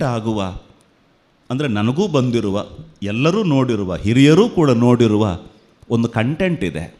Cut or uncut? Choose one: uncut